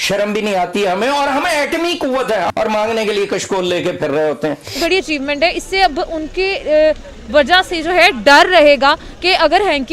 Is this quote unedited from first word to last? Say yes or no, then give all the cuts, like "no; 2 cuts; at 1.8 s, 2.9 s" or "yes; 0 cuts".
no; 2 cuts; at 2.5 s, 4.8 s